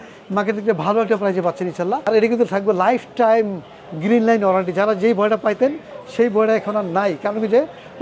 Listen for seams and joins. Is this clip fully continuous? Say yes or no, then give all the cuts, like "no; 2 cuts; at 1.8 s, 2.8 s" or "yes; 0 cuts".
no; 1 cut; at 2.0 s